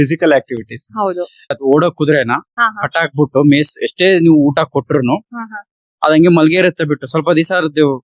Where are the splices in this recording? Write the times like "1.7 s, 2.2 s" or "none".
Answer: 1.5 s